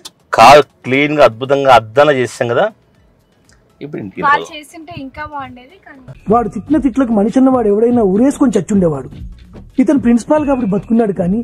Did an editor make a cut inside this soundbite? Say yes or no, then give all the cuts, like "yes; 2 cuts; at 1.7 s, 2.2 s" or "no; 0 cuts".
no; 0 cuts